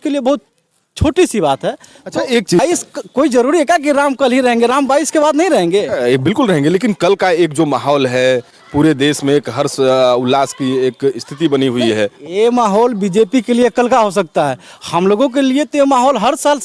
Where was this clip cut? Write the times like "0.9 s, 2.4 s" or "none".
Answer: 2.6 s